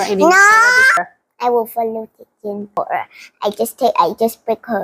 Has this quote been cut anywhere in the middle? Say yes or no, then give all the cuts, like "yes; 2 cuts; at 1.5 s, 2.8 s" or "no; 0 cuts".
yes; 2 cuts; at 1.0 s, 2.8 s